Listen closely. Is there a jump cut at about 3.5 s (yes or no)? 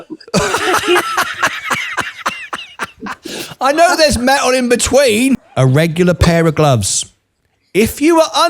no